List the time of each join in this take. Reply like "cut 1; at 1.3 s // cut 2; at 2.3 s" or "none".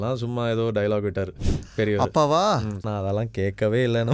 cut 1; at 2.8 s